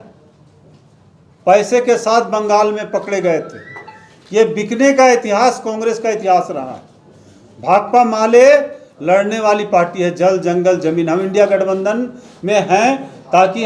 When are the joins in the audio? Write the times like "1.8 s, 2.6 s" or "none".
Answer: none